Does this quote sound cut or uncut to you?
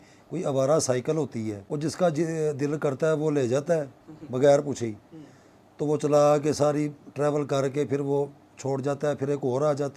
cut